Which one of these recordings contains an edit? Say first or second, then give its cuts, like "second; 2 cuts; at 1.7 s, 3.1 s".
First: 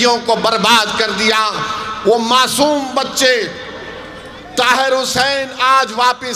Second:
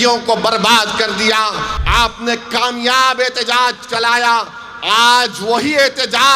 second; 1 cut; at 1.7 s